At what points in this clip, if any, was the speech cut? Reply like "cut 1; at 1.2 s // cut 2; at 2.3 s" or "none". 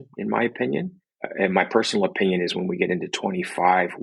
cut 1; at 1.0 s